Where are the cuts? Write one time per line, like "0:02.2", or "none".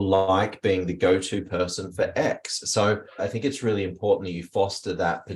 0:03.2